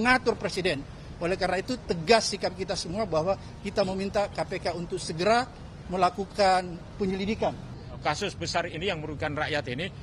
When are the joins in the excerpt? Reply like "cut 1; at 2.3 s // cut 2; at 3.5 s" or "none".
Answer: cut 1; at 7.7 s